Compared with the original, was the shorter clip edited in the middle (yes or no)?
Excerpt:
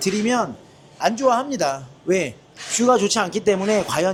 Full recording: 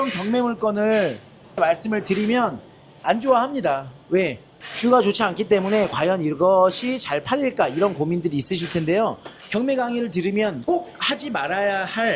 no